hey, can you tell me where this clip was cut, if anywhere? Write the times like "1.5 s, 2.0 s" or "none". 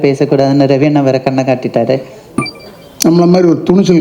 2.4 s